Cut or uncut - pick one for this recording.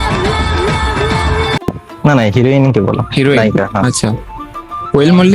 cut